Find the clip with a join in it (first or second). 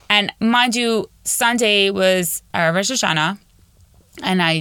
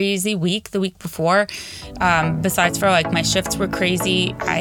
first